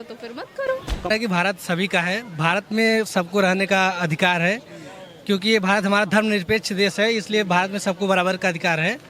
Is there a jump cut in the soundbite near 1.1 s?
yes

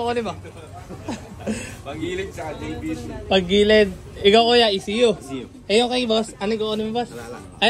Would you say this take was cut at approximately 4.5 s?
no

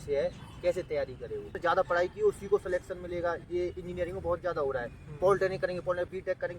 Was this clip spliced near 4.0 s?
no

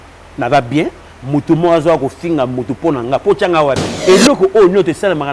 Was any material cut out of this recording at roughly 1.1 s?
no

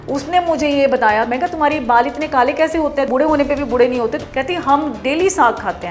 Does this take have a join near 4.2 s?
yes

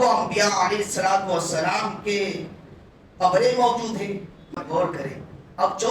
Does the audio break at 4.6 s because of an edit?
yes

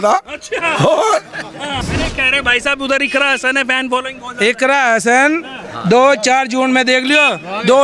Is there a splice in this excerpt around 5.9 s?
no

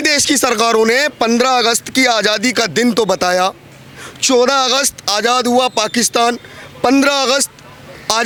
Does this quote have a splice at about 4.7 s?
no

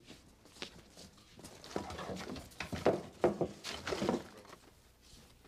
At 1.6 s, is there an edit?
no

